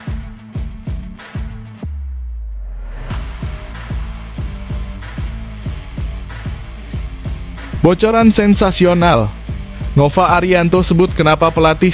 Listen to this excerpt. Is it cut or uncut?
uncut